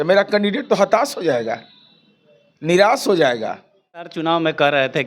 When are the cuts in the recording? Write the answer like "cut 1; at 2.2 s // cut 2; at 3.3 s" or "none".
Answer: cut 1; at 4.1 s